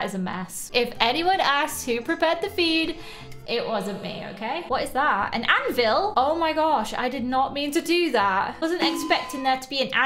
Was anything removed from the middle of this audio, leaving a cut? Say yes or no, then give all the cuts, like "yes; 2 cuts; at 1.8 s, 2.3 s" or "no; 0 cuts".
yes; 2 cuts; at 4.6 s, 6.1 s